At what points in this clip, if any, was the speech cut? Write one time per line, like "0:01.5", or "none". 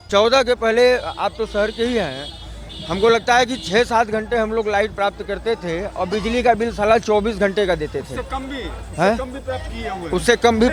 none